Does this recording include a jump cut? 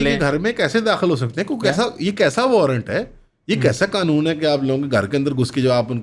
no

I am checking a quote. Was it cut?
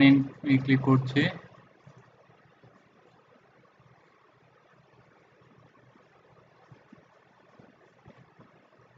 no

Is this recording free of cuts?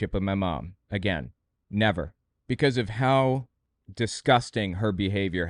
yes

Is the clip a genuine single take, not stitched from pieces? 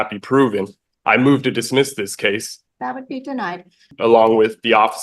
no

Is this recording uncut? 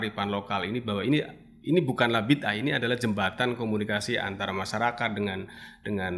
yes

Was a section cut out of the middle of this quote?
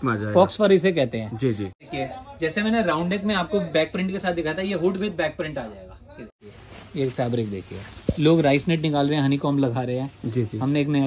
yes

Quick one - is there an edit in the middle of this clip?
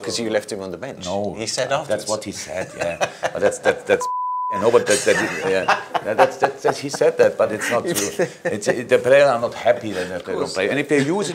no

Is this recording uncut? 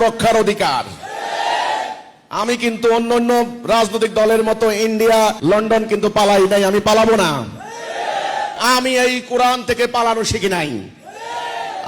no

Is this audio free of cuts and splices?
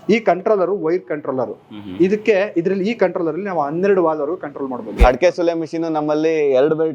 no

